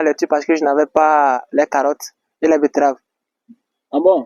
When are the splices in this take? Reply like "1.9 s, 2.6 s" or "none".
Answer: none